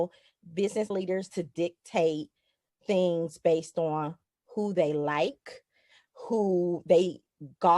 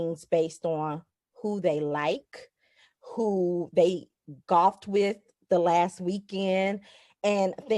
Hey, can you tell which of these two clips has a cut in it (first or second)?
first